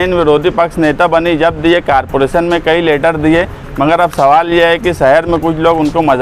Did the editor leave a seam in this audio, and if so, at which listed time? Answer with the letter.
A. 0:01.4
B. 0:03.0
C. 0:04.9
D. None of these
D